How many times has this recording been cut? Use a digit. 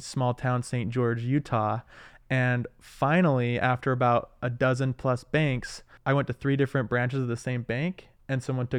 1